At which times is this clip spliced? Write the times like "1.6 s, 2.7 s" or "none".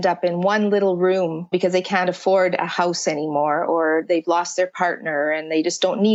none